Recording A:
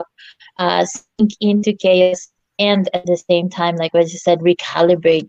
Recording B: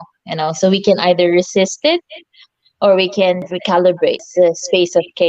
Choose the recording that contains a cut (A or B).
B